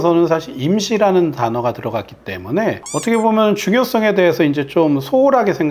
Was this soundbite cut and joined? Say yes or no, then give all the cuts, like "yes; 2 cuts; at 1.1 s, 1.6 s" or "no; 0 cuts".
no; 0 cuts